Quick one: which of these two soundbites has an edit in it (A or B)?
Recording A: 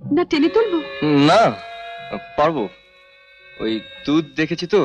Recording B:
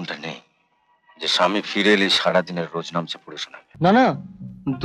B